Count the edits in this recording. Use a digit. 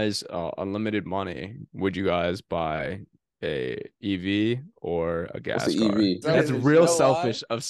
1